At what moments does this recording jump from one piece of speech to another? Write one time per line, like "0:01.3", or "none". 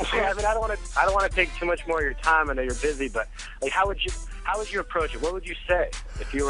0:04.3